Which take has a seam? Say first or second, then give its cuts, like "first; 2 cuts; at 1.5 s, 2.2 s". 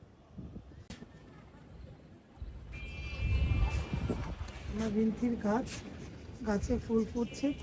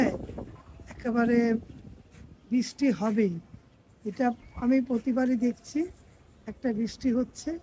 first; 1 cut; at 1.0 s